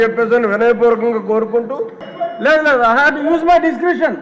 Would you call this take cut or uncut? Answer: cut